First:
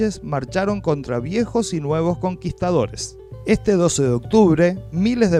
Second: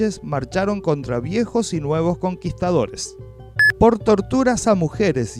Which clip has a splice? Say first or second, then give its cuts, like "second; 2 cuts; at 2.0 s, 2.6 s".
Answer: second; 1 cut; at 3.3 s